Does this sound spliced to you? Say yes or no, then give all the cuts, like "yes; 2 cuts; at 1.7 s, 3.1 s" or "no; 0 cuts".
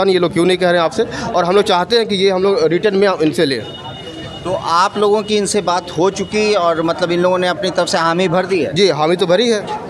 no; 0 cuts